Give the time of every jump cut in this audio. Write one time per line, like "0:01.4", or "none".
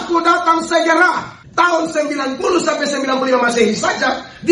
0:01.4